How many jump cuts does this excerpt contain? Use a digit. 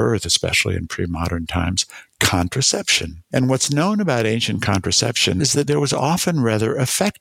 0